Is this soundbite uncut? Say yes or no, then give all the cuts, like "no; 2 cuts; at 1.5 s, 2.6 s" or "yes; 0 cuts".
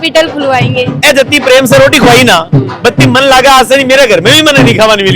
no; 1 cut; at 0.9 s